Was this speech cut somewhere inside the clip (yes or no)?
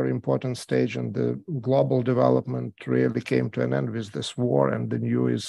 no